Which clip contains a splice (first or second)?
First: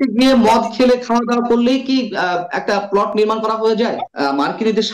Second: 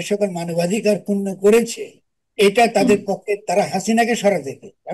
first